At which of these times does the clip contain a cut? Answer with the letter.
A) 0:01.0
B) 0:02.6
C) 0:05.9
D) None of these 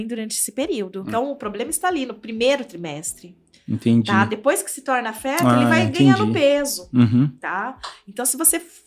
A